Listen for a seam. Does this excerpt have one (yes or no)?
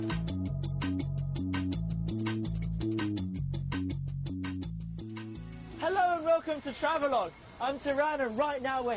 yes